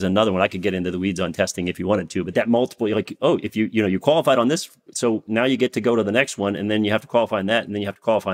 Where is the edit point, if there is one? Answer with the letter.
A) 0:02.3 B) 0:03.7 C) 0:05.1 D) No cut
A